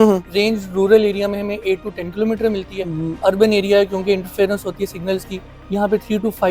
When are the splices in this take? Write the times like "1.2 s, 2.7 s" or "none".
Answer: none